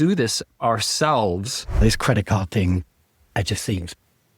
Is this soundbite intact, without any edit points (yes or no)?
no